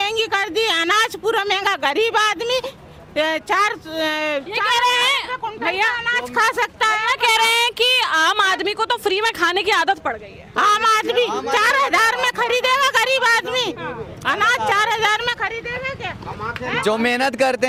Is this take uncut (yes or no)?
yes